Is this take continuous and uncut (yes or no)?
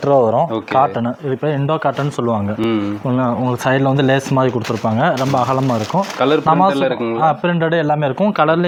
yes